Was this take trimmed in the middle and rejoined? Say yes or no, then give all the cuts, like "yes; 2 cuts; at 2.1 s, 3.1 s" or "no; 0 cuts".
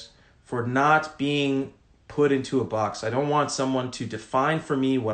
no; 0 cuts